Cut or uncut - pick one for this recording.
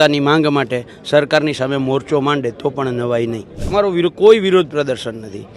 cut